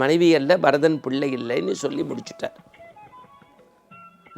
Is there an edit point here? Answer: no; 0 cuts

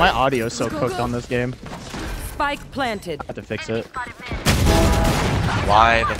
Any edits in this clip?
no; 0 cuts

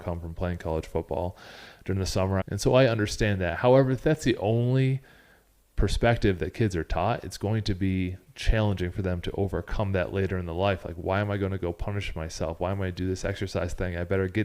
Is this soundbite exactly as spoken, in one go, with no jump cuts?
no; 1 cut; at 2.4 s

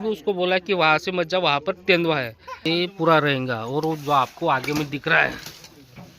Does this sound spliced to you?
yes; 1 cut; at 2.5 s

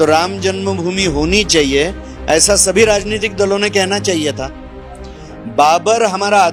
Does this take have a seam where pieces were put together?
no; 0 cuts

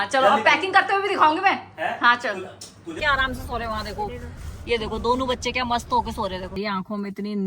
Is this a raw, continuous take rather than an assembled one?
no; 2 cuts; at 2.9 s, 6.5 s

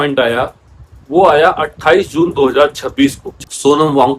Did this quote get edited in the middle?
yes; 1 cut; at 3.3 s

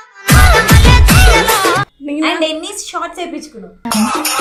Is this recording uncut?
yes; 0 cuts

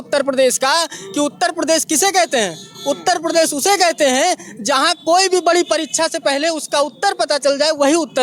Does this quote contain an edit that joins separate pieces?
no; 0 cuts

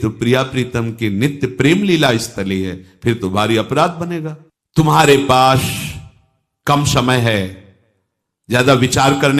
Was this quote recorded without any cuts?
yes; 0 cuts

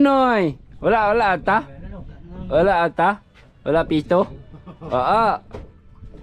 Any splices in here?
no; 0 cuts

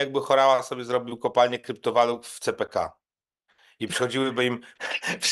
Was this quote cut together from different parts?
no; 0 cuts

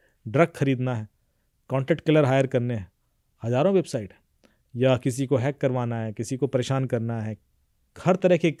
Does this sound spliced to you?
no; 0 cuts

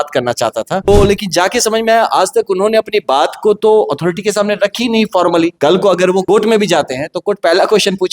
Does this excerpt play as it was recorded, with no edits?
no; 3 cuts; at 0.9 s, 5.5 s, 6.2 s

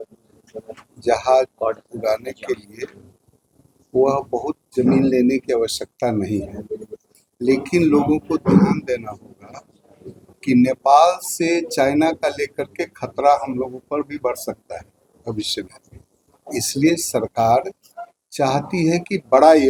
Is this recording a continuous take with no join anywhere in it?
yes; 0 cuts

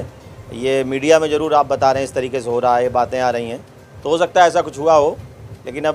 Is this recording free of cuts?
yes; 0 cuts

